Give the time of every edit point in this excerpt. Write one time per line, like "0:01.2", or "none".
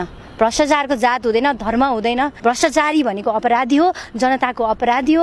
0:02.3